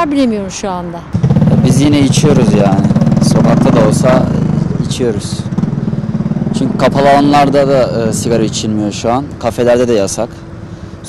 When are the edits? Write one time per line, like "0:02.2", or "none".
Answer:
none